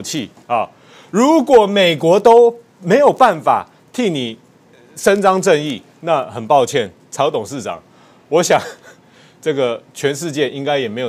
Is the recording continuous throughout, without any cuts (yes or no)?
yes